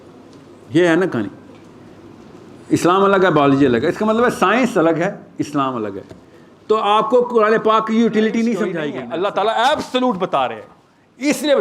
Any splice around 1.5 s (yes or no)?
no